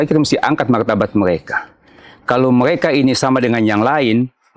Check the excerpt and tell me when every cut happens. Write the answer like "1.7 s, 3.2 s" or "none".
none